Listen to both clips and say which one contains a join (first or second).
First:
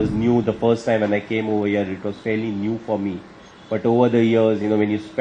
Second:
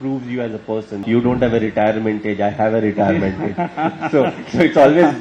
second